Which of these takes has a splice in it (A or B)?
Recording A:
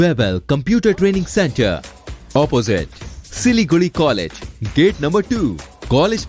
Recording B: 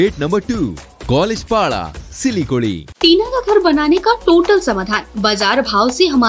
B